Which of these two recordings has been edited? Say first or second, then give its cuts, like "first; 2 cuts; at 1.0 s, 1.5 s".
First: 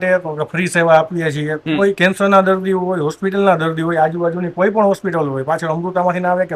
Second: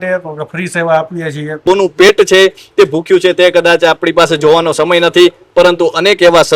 second; 1 cut; at 1.6 s